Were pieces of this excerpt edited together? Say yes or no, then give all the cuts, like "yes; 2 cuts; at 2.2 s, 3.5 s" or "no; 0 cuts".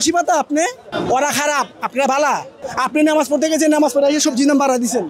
yes; 2 cuts; at 0.9 s, 2.6 s